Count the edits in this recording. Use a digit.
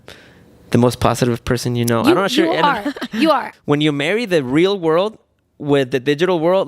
1